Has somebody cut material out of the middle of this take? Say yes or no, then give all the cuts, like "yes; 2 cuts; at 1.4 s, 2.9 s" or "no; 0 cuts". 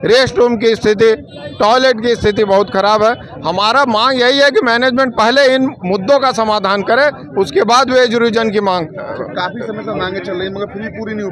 no; 0 cuts